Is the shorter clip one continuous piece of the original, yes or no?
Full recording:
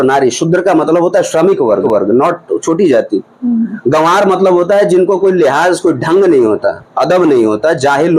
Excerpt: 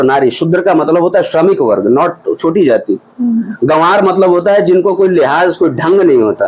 no